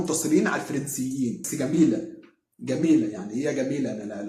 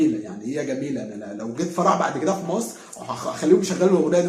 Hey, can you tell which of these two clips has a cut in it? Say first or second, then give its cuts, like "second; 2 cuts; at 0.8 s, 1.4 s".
first; 1 cut; at 1.4 s